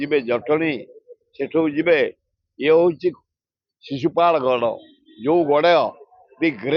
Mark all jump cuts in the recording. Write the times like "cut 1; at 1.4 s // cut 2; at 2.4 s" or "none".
none